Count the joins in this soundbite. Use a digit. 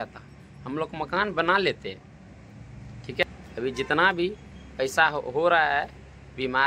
1